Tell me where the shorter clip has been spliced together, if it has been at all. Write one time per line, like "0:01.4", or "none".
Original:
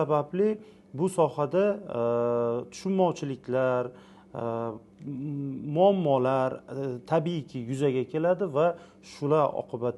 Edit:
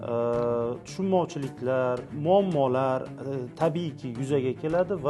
0:02.1